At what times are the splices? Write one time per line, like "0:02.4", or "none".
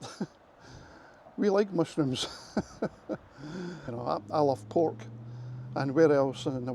0:03.9

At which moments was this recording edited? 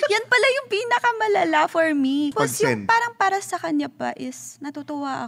0:02.3

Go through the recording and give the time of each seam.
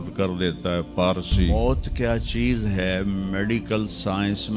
0:01.5

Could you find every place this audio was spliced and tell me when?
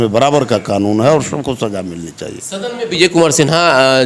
none

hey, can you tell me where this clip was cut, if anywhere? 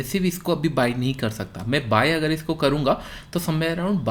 none

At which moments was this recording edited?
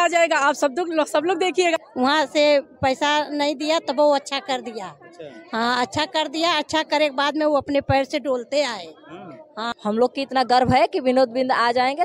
0:01.8
0:09.7

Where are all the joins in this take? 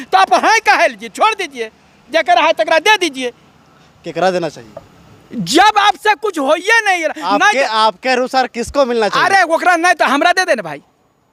none

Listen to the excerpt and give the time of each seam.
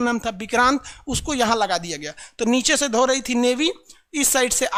none

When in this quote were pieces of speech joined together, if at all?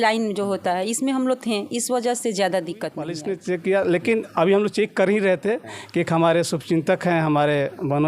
0:03.2

